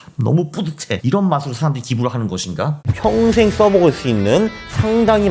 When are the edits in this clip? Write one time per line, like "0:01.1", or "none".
0:01.0
0:02.8